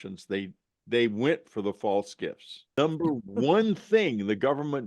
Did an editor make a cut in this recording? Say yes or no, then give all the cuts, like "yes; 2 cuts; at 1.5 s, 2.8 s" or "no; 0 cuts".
yes; 1 cut; at 2.7 s